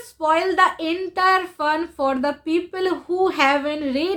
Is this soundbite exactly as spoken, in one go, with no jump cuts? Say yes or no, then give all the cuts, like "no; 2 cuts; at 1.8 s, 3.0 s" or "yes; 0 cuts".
yes; 0 cuts